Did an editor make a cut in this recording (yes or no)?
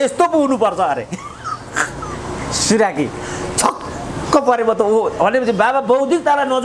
no